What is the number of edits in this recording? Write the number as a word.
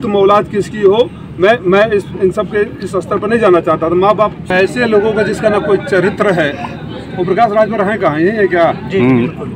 one